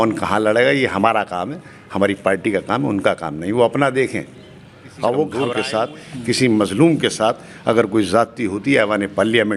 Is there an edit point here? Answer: yes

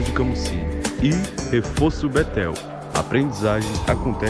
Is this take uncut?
yes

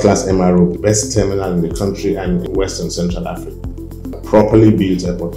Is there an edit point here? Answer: yes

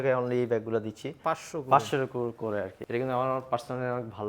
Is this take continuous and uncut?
no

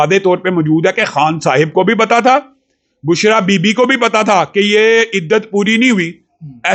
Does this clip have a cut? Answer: no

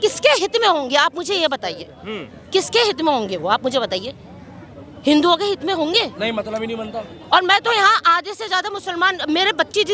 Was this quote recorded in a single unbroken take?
yes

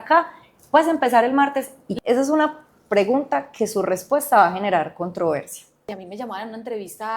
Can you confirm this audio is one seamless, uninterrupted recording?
no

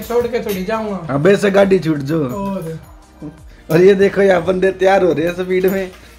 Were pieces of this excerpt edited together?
no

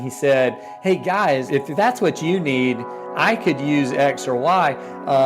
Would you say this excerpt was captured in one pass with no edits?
no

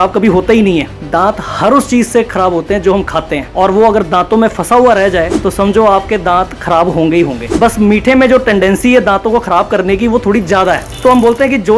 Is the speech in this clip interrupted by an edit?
yes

